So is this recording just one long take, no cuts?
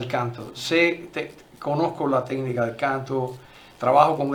yes; 0 cuts

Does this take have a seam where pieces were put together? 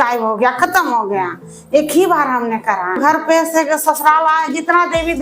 yes; 1 cut; at 3.0 s

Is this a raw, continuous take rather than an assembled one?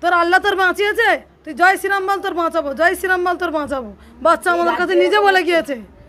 yes; 0 cuts

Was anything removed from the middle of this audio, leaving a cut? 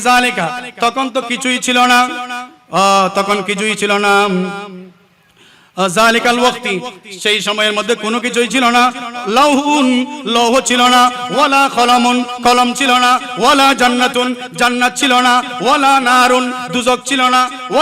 no; 0 cuts

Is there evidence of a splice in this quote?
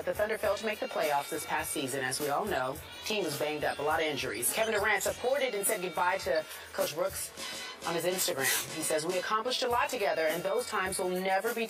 no; 0 cuts

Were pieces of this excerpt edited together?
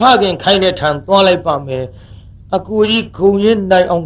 no; 0 cuts

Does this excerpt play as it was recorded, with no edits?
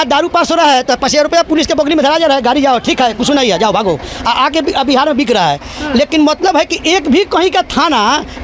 yes; 0 cuts

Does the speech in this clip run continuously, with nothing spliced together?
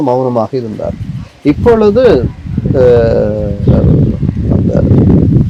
yes; 0 cuts

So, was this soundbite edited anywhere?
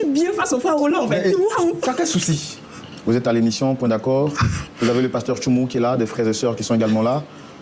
no; 0 cuts

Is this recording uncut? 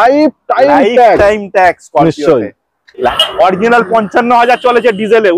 no; 1 cut; at 3.1 s

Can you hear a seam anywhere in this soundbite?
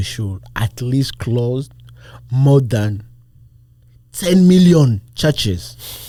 no; 0 cuts

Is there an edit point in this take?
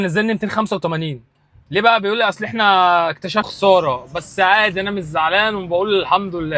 yes; 1 cut; at 3.5 s

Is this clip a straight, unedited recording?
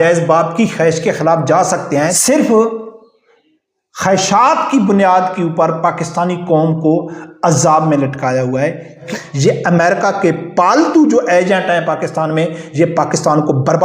no; 2 cuts; at 2.2 s, 9.0 s

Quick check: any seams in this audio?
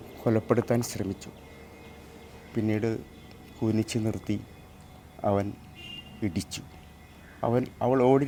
no; 0 cuts

